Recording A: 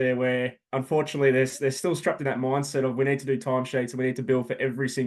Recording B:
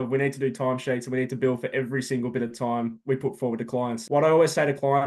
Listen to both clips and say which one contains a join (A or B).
B